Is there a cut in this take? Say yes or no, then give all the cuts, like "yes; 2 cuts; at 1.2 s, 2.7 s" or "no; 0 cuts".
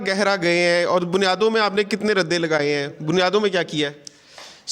no; 0 cuts